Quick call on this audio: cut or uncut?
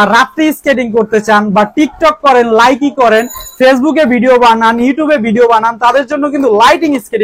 uncut